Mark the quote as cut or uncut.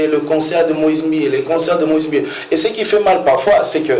uncut